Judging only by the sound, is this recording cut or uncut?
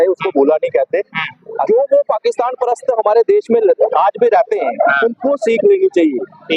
cut